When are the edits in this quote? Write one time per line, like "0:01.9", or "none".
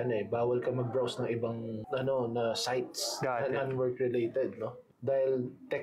0:01.8